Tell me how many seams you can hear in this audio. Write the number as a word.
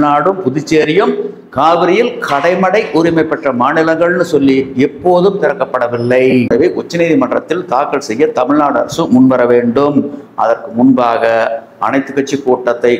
one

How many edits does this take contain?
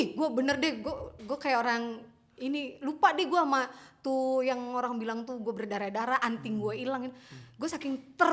zero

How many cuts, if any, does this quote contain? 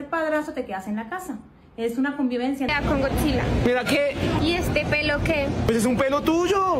one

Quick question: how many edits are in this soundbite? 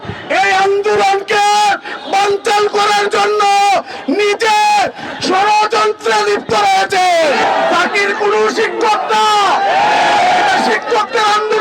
one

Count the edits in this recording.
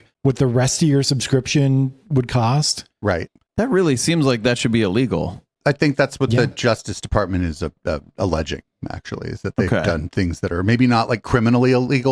one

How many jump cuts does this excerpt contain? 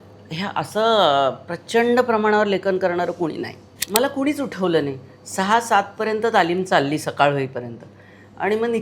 one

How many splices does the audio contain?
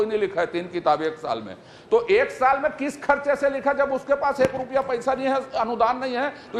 zero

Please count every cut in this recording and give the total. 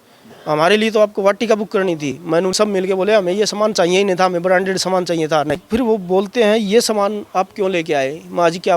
two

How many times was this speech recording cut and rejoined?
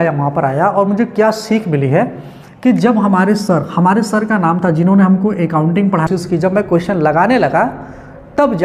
one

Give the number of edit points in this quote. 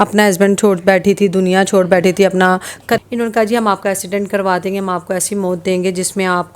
one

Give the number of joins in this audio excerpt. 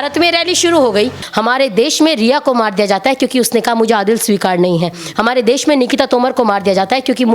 one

